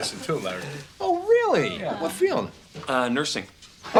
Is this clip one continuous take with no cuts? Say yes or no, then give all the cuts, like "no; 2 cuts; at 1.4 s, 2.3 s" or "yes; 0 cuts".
yes; 0 cuts